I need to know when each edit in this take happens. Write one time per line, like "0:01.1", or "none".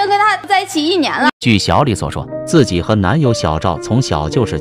none